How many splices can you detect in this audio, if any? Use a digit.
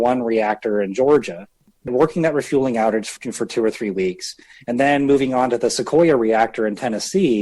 2